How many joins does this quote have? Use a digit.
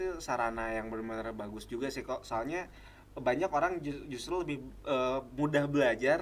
0